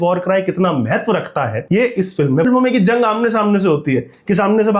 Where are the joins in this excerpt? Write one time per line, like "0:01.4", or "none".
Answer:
0:01.6
0:02.4

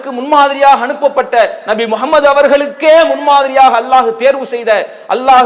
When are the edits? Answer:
none

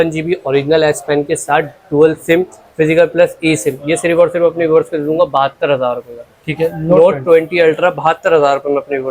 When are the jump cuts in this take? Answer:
none

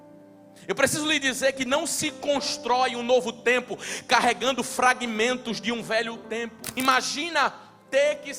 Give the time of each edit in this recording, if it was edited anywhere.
0:06.6

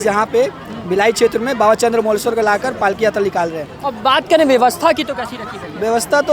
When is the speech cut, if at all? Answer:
none

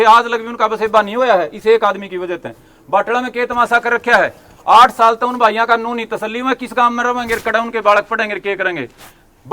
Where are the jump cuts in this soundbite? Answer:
none

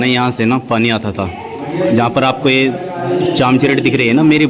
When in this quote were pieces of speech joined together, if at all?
none

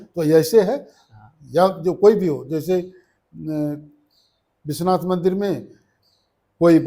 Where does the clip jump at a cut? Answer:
none

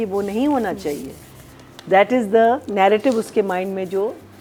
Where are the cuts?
none

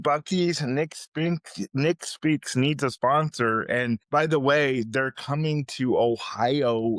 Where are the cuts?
0:04.0

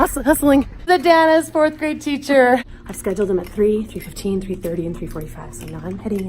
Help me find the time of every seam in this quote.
0:00.8
0:02.8

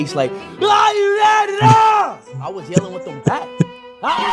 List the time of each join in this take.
none

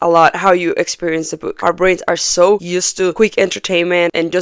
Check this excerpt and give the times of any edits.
0:01.5
0:03.1

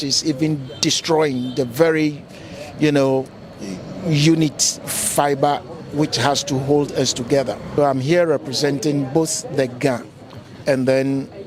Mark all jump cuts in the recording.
0:07.6

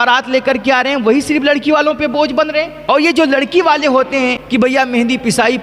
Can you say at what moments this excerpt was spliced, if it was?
0:02.8
0:04.4

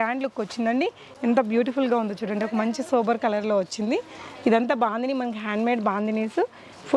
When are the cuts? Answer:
0:01.0

